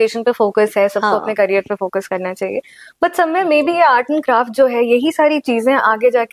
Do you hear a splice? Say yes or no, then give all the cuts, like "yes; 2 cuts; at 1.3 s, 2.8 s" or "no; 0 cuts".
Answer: no; 0 cuts